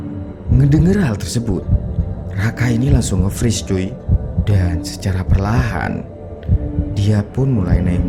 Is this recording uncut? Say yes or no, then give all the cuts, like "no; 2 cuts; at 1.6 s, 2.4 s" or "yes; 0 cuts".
yes; 0 cuts